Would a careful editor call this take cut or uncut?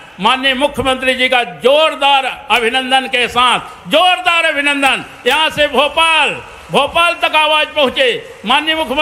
uncut